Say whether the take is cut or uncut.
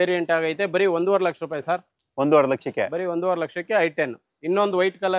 uncut